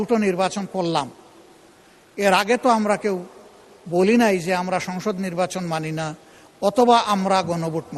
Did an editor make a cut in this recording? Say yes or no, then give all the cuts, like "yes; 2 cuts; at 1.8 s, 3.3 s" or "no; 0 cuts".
no; 0 cuts